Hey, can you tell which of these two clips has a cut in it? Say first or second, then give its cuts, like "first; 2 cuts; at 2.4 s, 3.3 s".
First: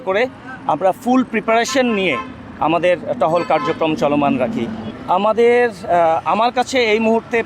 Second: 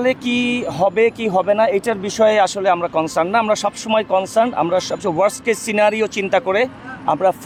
first; 1 cut; at 4.9 s